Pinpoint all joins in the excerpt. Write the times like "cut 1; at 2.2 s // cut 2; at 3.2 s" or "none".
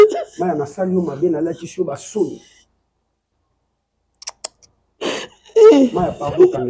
none